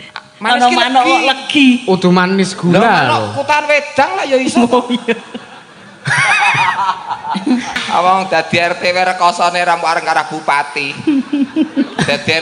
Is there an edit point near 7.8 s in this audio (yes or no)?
yes